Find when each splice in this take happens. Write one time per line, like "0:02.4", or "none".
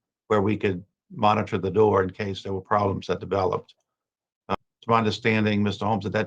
0:04.6